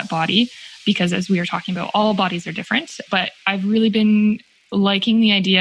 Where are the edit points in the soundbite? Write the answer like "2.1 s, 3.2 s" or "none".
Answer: none